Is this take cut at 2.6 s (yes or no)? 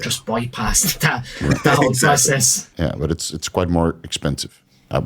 yes